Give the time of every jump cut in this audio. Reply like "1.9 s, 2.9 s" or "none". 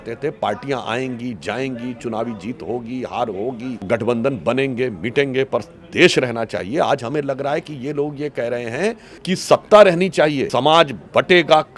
3.9 s, 9.1 s, 10.4 s